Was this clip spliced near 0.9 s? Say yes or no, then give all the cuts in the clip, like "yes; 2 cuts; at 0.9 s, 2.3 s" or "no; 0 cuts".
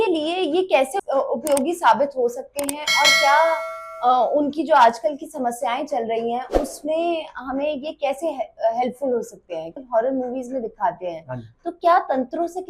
yes; 2 cuts; at 0.9 s, 9.7 s